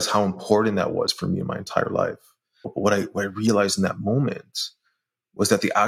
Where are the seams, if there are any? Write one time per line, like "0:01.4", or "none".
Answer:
0:02.6

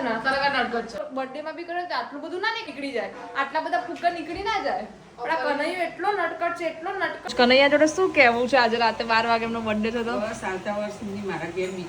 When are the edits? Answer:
0:01.0
0:02.7
0:07.3

